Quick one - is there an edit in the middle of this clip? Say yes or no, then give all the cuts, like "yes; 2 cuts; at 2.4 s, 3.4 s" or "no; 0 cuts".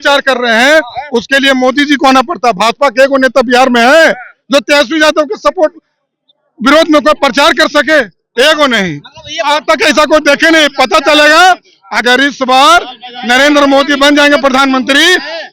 no; 0 cuts